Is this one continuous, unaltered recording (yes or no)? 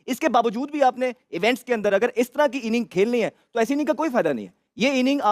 yes